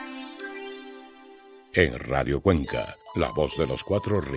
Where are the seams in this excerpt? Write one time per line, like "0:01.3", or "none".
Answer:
0:01.4